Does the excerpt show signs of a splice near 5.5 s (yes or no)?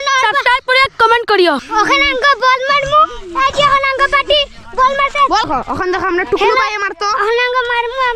yes